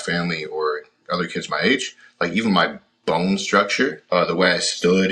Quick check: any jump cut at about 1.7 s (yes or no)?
no